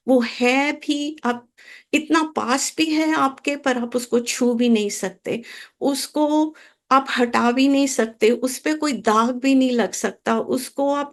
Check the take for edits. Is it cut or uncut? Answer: uncut